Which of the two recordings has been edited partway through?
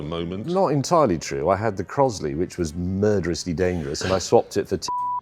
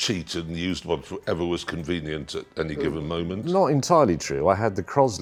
first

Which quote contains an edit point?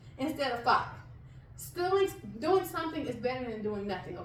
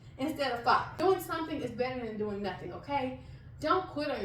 second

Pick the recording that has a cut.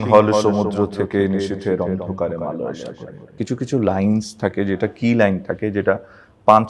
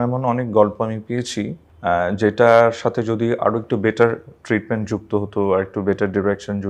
first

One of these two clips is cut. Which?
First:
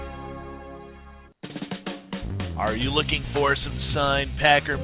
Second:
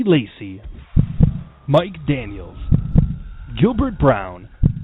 first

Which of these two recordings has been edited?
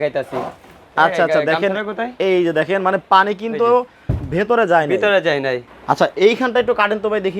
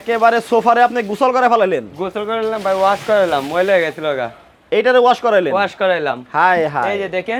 first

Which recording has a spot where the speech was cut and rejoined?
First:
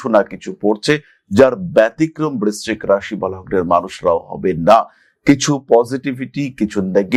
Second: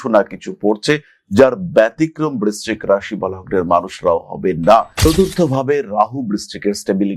second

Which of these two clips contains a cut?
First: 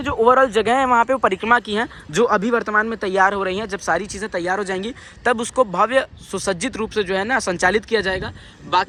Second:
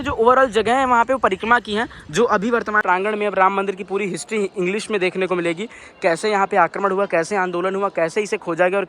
second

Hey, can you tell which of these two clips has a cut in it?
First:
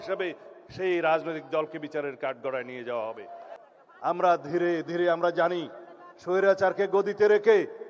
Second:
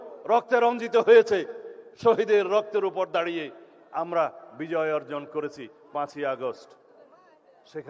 first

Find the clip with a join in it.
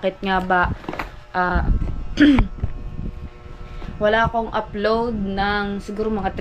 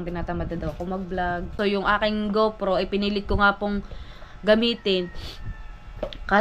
second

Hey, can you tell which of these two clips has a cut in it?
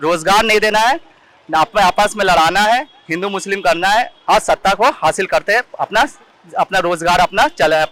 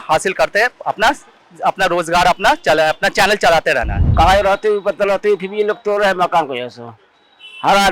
second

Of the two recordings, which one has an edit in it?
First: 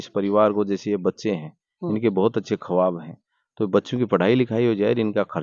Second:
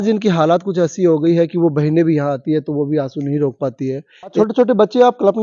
second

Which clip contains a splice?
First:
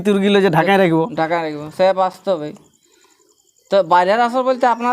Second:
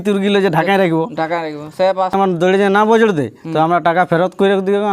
second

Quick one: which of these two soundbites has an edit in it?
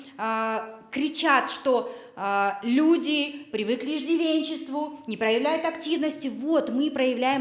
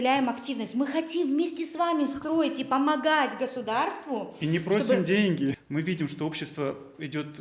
second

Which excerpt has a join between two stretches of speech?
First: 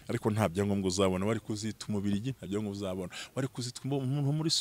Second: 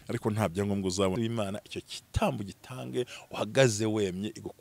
second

